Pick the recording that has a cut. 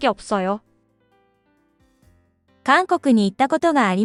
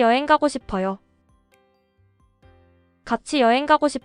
second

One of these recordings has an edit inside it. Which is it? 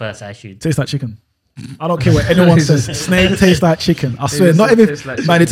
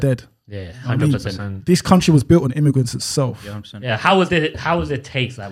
second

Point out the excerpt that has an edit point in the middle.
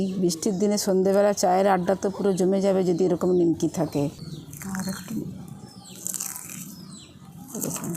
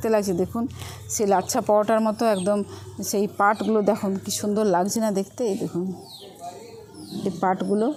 first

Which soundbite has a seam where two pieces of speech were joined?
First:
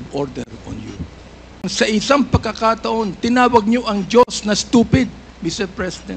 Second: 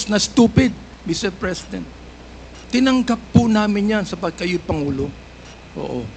first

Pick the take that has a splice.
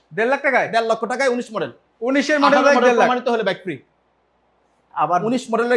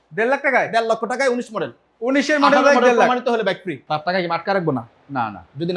second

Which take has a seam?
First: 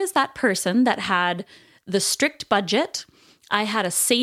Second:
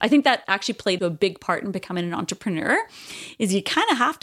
second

